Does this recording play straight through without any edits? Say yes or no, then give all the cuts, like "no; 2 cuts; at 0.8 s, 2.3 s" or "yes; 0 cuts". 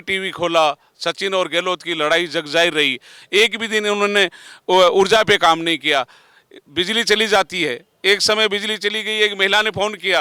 yes; 0 cuts